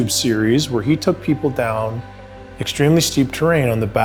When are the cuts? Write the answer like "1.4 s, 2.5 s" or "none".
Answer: none